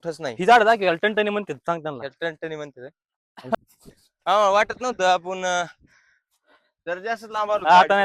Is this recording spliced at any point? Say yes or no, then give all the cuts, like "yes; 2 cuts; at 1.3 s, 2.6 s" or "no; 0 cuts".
yes; 1 cut; at 3.5 s